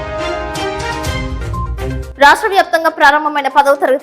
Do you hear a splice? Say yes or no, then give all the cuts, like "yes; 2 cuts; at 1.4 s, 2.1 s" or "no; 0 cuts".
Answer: yes; 1 cut; at 2.0 s